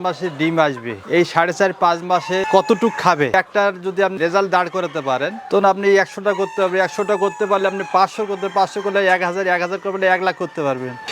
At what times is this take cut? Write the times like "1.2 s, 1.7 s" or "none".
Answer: 3.3 s